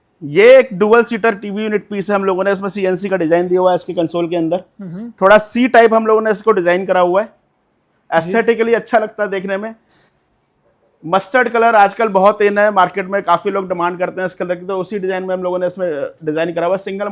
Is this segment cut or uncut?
uncut